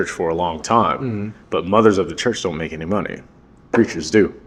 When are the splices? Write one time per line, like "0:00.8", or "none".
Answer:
none